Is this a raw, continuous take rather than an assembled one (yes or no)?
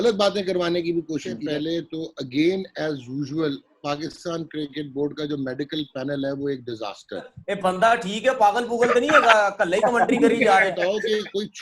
no